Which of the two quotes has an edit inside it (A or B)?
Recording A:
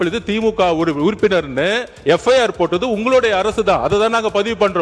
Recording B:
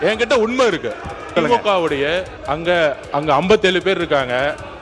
B